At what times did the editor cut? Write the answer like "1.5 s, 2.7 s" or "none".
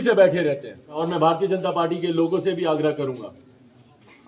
1.0 s